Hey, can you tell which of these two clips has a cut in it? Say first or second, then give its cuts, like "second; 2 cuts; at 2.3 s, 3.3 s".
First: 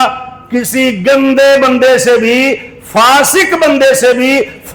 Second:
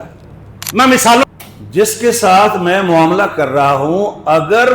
second; 1 cut; at 1.2 s